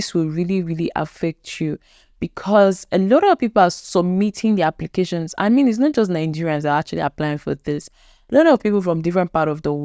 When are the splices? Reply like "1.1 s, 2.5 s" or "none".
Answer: none